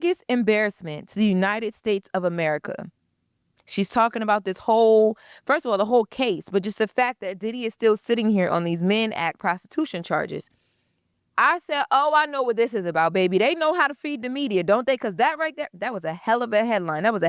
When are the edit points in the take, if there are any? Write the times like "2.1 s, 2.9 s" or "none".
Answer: none